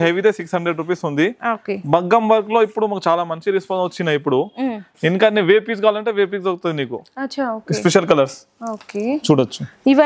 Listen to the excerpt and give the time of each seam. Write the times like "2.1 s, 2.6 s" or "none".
none